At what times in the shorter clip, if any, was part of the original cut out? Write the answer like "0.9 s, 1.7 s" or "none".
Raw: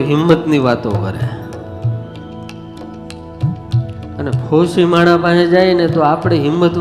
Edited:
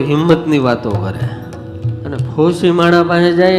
1.9 s